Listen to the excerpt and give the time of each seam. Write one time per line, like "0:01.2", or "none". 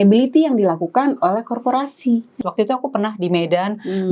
0:02.4